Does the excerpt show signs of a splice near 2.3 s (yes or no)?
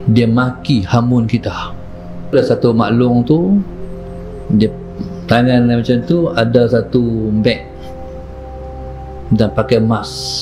yes